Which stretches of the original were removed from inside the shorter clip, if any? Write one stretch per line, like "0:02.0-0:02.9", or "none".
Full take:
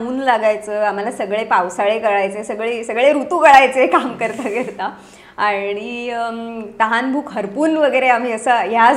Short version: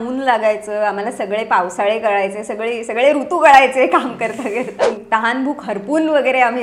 0:04.9-0:06.6